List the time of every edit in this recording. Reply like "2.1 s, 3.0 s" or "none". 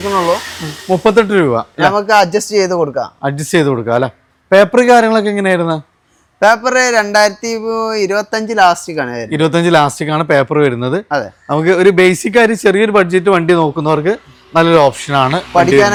none